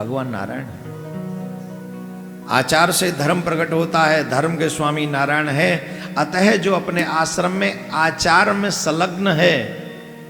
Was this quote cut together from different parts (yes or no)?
no